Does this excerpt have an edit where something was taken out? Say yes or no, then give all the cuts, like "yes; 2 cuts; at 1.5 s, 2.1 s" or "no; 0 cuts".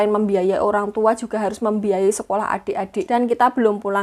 yes; 1 cut; at 3.1 s